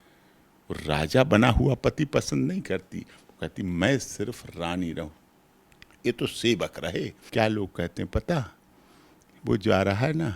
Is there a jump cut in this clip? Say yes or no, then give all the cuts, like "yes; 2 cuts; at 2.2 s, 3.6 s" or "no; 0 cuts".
yes; 1 cut; at 7.2 s